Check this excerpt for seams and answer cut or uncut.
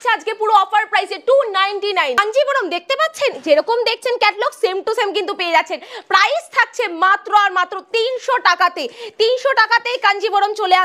uncut